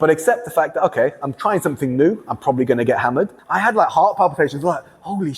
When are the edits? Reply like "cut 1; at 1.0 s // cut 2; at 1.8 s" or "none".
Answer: cut 1; at 3.4 s